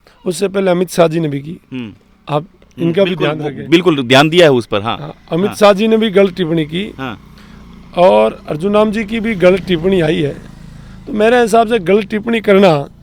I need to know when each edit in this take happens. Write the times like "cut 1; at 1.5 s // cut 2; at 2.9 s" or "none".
none

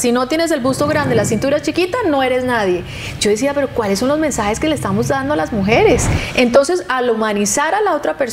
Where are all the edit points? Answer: cut 1; at 6.2 s

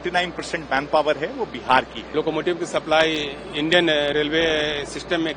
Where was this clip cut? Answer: cut 1; at 2.1 s

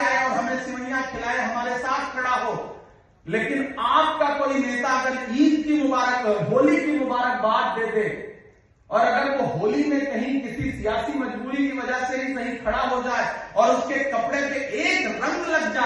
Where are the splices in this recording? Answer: none

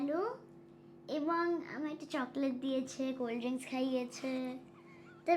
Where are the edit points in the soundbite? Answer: none

